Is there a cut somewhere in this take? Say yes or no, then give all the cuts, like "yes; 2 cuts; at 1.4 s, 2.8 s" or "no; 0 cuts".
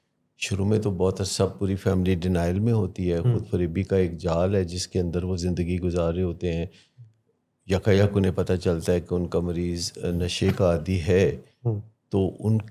no; 0 cuts